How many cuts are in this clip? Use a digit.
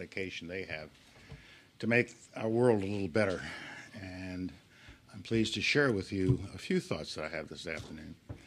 1